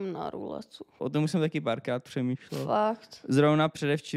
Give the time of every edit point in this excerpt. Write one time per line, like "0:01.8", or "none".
0:01.0